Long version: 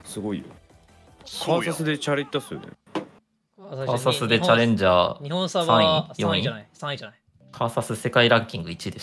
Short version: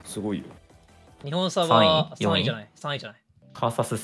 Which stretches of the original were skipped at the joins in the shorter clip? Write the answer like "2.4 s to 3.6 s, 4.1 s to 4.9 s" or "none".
1.2 s to 5.2 s